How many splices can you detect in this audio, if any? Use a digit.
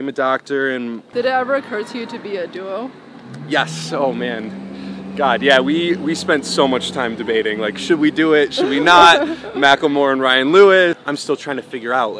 2